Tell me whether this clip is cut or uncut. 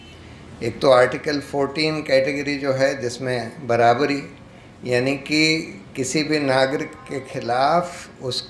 uncut